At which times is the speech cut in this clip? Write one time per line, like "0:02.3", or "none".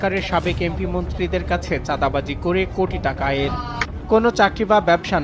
0:03.9